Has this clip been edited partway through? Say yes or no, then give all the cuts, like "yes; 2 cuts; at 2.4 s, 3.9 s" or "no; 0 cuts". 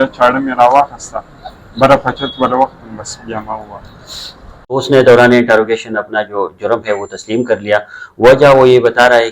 yes; 1 cut; at 4.7 s